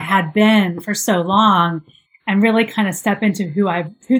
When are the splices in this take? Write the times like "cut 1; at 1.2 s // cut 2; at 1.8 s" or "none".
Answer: none